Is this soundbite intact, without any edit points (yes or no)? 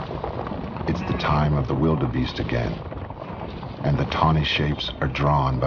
no